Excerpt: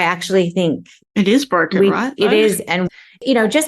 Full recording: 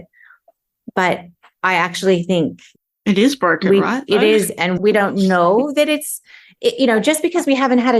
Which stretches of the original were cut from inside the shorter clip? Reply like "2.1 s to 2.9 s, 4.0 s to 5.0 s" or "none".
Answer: 2.7 s to 2.8 s, 4.7 s to 6.4 s